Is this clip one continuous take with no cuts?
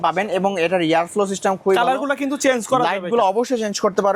yes; 0 cuts

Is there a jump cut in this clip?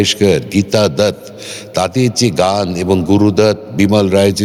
no; 0 cuts

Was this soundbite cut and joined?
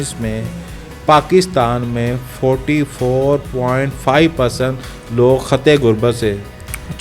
no; 0 cuts

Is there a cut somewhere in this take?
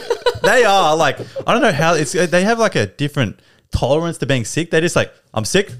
no; 0 cuts

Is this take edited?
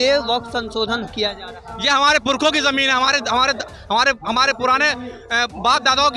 no; 0 cuts

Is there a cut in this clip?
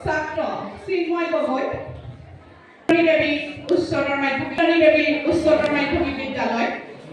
yes; 1 cut; at 4.6 s

